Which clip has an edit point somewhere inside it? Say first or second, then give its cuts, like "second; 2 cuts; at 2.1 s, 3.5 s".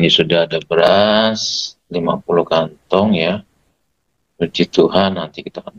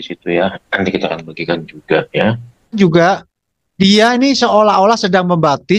second; 1 cut; at 2.8 s